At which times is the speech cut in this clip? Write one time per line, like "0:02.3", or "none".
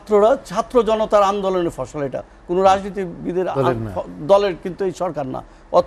none